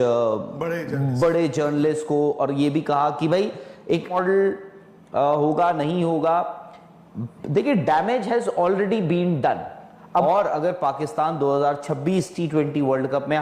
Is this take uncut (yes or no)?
no